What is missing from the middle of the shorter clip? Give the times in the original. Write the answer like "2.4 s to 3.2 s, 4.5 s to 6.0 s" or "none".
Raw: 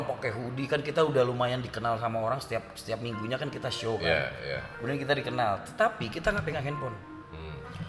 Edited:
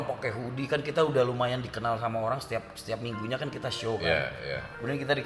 none